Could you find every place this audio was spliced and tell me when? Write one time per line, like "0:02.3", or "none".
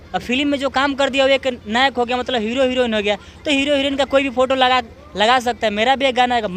none